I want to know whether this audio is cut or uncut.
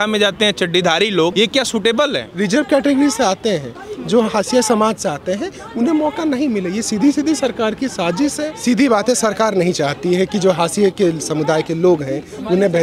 cut